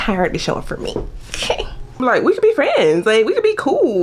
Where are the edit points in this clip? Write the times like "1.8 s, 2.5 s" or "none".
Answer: 2.0 s